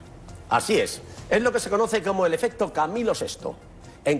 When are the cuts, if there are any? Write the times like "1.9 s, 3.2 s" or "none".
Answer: none